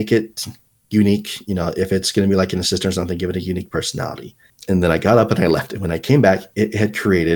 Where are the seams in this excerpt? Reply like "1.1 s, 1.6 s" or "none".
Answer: 4.5 s